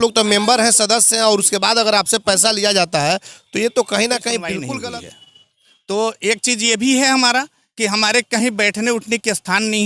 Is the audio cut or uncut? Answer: cut